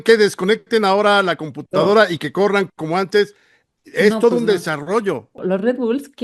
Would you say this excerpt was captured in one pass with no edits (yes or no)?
no